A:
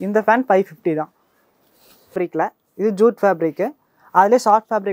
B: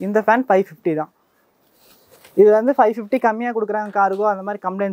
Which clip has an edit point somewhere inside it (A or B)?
A